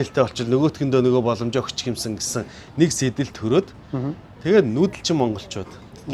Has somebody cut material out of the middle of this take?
no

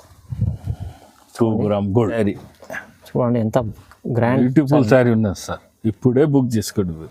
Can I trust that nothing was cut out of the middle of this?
no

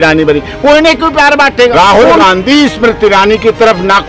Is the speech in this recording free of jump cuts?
no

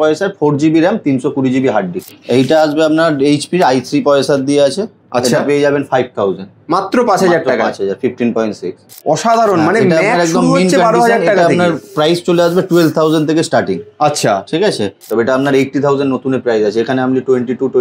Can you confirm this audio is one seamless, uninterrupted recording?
no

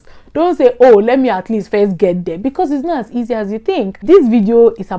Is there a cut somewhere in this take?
yes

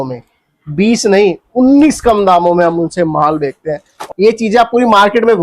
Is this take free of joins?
no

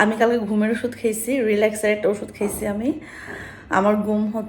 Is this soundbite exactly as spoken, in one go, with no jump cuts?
yes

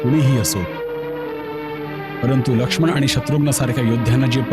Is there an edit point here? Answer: no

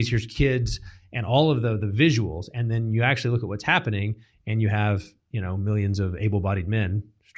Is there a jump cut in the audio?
no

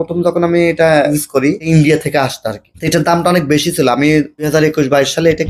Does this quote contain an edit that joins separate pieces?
no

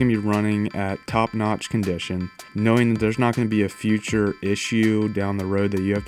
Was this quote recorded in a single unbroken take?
no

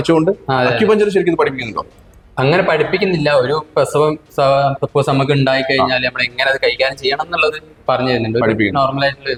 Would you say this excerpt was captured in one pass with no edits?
yes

